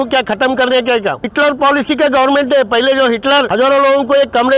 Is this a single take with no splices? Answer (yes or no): no